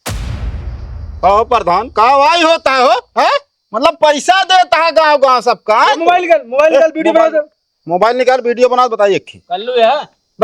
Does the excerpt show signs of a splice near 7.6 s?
no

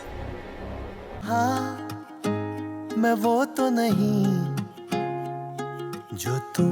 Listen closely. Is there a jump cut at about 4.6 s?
no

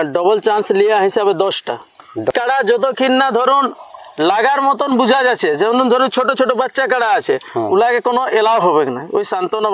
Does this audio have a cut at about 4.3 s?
no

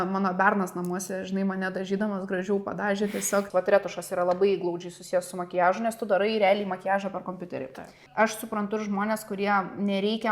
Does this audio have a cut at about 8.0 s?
yes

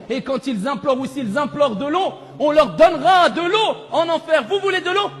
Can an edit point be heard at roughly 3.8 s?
yes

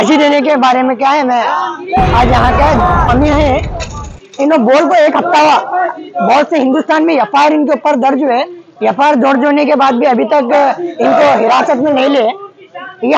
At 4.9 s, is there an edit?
no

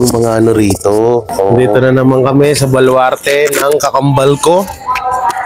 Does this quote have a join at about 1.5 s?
yes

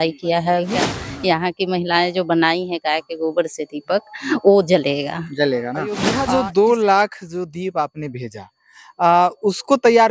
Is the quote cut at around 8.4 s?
no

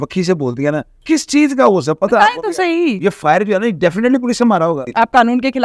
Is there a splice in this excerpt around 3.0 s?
yes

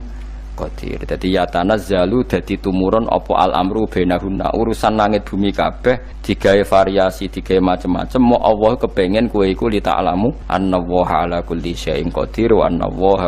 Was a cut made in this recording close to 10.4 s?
yes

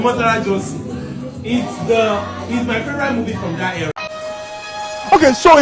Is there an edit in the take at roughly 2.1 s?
no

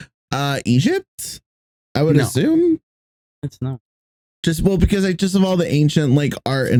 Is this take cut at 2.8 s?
no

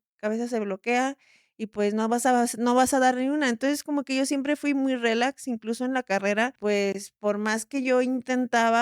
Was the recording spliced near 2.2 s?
no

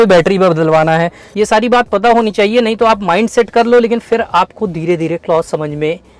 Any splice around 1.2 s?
yes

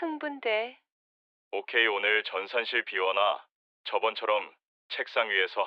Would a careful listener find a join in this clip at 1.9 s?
no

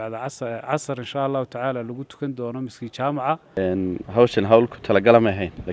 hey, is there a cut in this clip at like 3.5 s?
yes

